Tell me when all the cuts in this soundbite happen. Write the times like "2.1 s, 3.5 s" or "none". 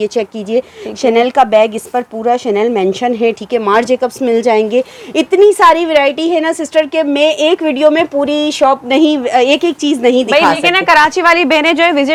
none